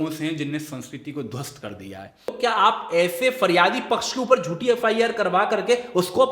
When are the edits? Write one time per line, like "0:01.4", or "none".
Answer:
0:02.4